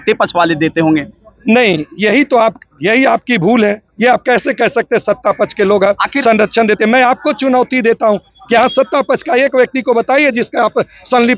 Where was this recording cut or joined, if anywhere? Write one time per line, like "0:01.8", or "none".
none